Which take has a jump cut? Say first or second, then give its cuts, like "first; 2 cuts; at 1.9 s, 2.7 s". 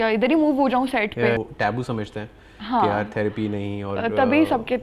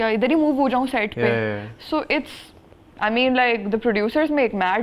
first; 1 cut; at 1.4 s